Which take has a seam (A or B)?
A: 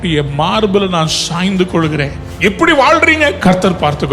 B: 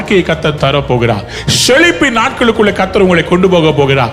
A